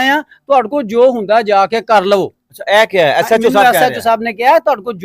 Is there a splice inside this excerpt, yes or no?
no